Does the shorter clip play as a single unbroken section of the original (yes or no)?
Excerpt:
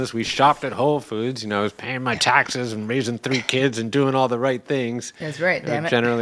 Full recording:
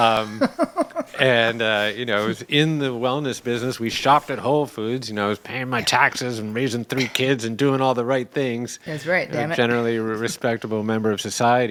yes